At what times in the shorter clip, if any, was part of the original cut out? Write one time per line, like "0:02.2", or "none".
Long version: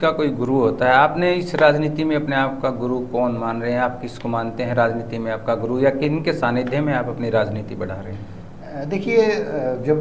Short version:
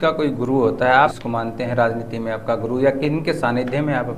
0:01.1